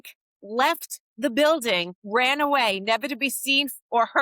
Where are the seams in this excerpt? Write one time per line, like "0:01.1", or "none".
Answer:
0:01.9

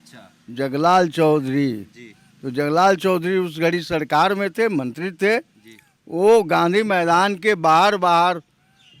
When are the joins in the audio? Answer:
none

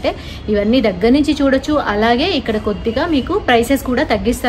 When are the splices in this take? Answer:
none

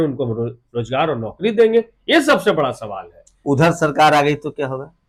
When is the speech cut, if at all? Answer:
none

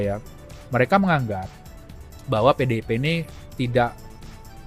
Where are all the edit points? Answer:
none

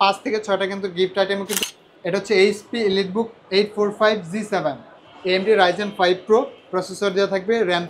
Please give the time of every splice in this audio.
0:01.6

